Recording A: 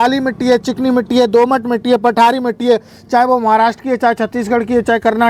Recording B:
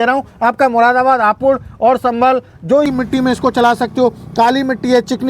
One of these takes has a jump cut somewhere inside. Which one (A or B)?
B